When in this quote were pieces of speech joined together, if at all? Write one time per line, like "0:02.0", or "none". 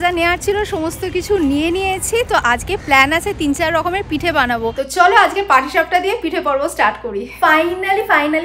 0:04.8
0:07.3

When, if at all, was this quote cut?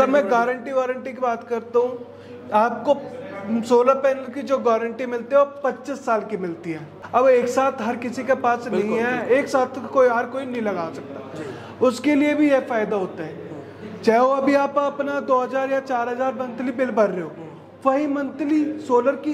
0:06.9

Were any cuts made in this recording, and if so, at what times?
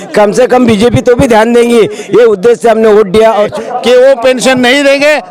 0:03.5

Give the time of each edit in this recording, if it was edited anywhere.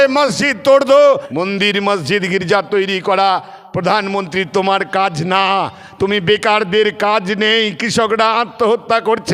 0:01.3

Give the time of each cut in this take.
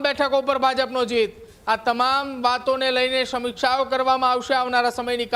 none

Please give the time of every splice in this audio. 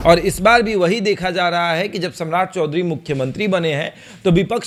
none

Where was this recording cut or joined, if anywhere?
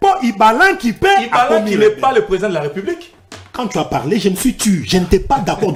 none

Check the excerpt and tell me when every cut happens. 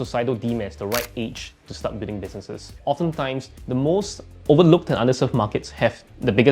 0:02.8
0:03.5

